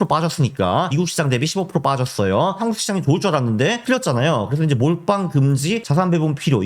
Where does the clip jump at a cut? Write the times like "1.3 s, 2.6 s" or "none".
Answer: 0.9 s, 2.6 s, 3.8 s, 5.8 s